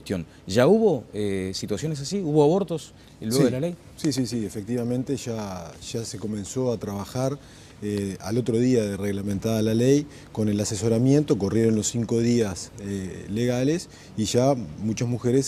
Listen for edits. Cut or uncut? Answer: uncut